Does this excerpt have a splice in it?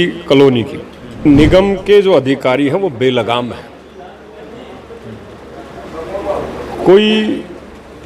yes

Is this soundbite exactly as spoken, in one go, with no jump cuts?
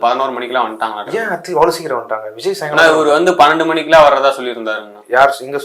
yes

